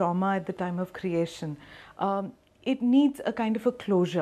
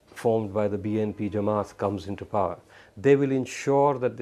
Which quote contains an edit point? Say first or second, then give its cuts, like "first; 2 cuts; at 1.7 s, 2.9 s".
second; 1 cut; at 1.5 s